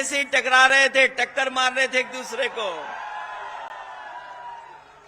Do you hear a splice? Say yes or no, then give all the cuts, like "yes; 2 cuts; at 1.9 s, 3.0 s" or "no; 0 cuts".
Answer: no; 0 cuts